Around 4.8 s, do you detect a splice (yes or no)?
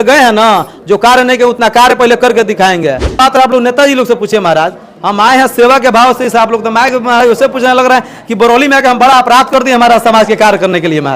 no